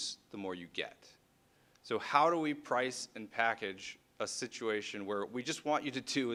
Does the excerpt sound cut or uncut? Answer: uncut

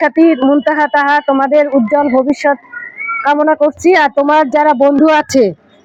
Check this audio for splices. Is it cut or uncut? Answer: uncut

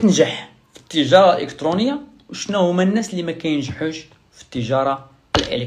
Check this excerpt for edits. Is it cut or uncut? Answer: uncut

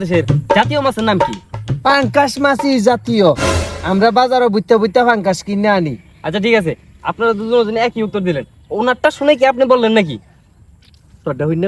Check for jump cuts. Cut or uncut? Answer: uncut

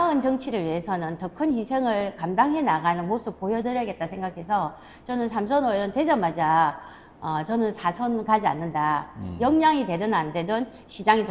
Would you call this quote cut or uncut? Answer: uncut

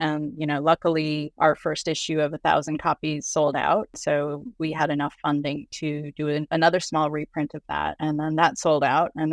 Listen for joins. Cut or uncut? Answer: cut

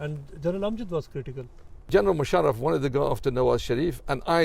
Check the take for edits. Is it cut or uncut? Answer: cut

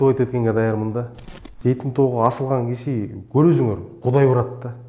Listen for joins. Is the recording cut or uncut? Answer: cut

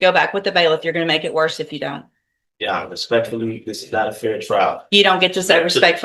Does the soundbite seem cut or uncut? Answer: uncut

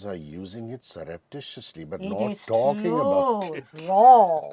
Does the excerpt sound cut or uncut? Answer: uncut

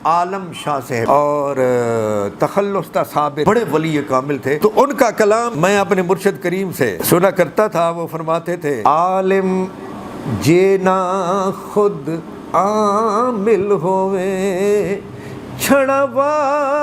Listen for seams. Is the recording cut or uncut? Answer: cut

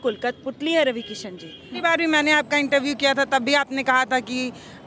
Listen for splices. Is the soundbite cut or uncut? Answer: cut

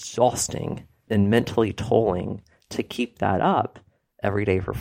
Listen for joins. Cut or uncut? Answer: cut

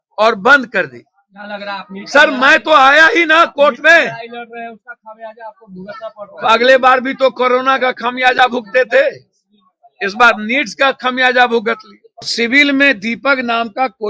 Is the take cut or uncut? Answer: cut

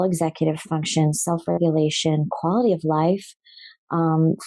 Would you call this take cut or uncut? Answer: uncut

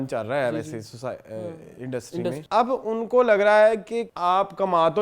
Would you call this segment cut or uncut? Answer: cut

